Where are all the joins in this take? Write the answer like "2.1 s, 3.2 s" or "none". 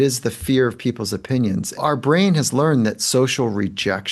1.8 s